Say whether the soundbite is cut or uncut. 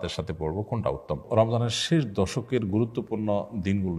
cut